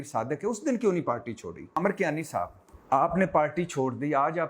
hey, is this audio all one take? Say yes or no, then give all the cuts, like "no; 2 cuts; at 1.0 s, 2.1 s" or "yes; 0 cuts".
no; 2 cuts; at 1.8 s, 2.7 s